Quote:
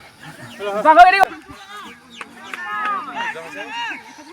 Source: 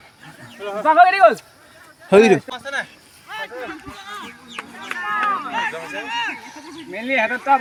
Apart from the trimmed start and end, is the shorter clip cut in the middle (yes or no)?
yes